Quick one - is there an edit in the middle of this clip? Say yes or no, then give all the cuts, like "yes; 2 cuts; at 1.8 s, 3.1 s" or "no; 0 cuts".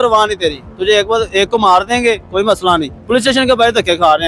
yes; 1 cut; at 2.9 s